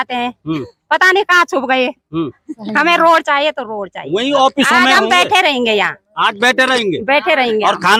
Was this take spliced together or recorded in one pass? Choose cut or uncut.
uncut